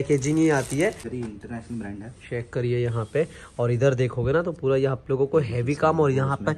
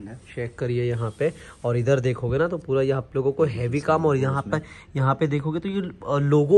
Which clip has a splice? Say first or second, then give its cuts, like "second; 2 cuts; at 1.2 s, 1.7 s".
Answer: first; 1 cut; at 1.0 s